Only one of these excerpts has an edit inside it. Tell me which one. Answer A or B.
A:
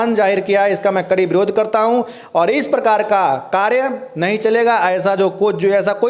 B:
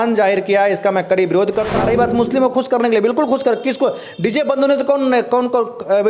B